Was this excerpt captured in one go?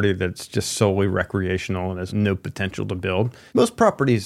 no; 2 cuts; at 2.1 s, 3.4 s

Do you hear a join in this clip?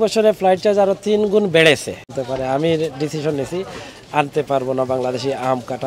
yes; 1 cut; at 2.2 s

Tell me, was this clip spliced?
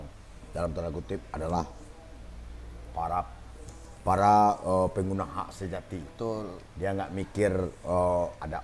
no; 0 cuts

